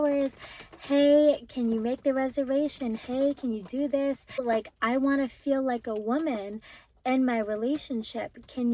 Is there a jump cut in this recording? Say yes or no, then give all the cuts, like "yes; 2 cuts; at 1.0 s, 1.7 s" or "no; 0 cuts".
yes; 1 cut; at 4.4 s